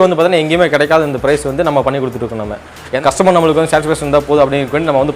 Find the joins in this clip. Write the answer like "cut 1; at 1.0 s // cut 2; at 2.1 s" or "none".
cut 1; at 2.9 s